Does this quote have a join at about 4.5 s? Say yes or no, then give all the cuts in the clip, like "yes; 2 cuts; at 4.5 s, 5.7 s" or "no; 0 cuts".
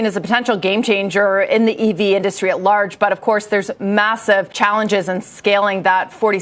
yes; 1 cut; at 4.5 s